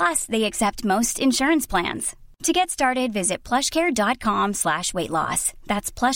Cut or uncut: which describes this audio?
uncut